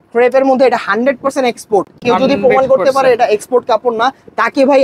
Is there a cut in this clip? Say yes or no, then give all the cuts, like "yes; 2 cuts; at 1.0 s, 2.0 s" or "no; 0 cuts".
no; 0 cuts